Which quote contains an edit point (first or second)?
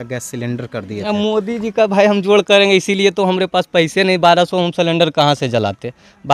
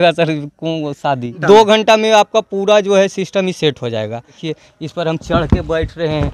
second